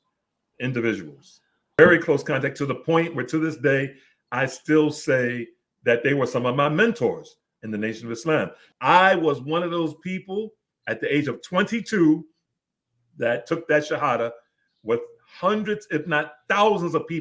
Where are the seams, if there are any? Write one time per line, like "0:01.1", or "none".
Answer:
0:01.8
0:08.7